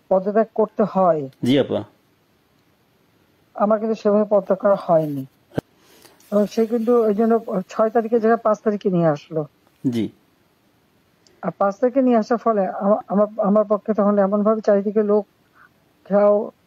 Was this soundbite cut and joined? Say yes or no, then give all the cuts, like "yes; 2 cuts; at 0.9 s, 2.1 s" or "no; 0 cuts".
yes; 1 cut; at 5.6 s